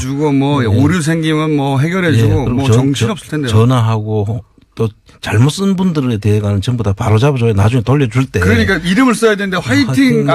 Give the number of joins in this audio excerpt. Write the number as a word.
one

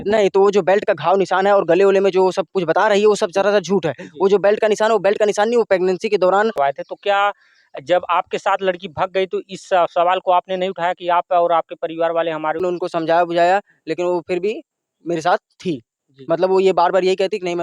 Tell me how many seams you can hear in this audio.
two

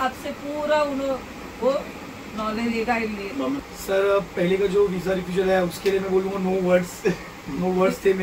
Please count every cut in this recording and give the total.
one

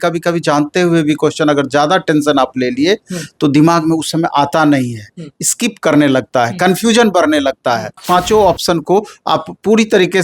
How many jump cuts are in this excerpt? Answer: one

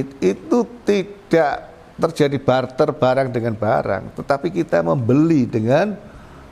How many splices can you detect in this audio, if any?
zero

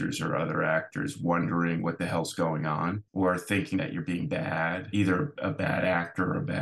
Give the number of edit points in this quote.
two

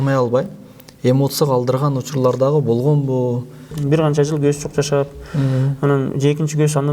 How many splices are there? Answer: one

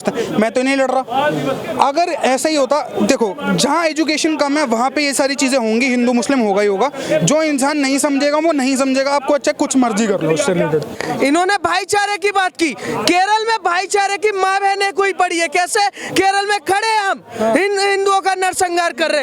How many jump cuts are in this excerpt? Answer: one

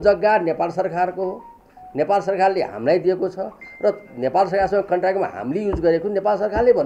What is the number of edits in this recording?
zero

